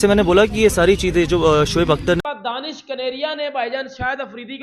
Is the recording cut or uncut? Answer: cut